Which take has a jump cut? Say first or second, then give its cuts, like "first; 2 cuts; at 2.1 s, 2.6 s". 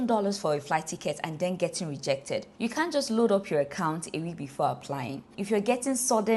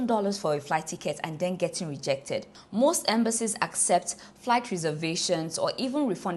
first; 2 cuts; at 2.5 s, 5.2 s